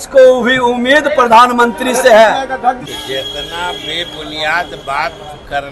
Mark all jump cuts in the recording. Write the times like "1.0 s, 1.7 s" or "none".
2.8 s